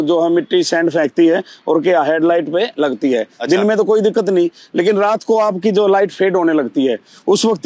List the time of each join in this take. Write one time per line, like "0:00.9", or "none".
none